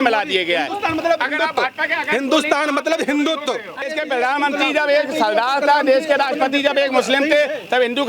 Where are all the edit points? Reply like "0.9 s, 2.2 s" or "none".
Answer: 3.9 s